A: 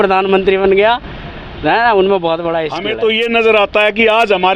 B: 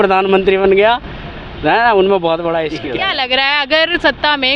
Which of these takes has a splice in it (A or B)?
A